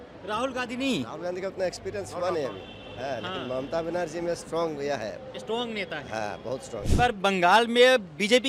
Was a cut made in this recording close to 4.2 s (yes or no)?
no